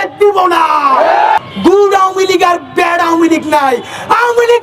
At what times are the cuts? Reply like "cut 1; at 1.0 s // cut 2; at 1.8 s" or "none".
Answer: cut 1; at 1.4 s